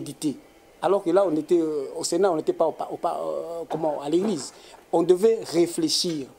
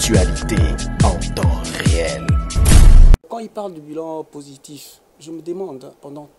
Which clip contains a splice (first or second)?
second